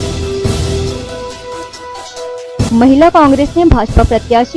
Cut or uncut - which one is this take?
uncut